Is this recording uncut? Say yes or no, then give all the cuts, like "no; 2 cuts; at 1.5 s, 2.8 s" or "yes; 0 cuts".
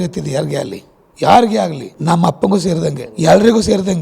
no; 2 cuts; at 1.9 s, 3.0 s